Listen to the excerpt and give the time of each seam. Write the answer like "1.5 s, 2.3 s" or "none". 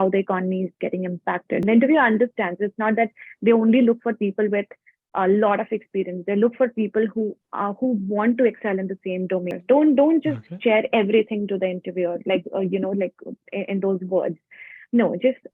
1.6 s, 9.6 s